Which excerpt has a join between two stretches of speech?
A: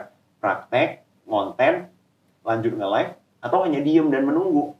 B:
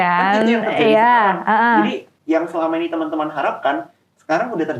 B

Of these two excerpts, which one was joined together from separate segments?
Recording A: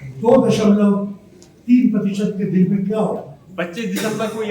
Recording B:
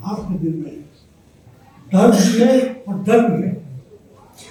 A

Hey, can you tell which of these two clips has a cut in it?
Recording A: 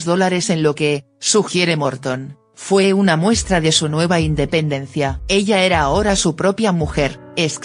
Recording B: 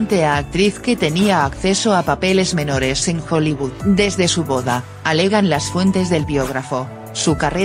B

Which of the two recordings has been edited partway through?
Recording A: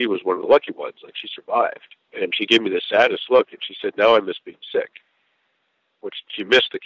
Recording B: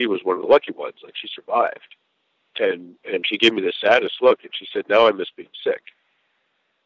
A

